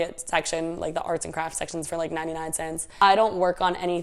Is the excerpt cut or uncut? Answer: cut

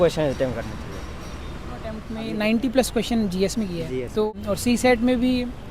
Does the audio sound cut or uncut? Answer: cut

